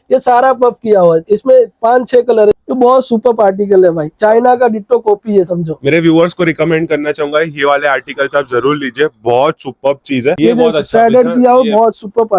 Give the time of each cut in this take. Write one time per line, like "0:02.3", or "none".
0:02.5
0:10.4